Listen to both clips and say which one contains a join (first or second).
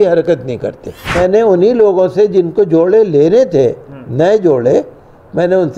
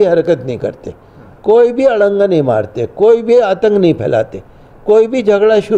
first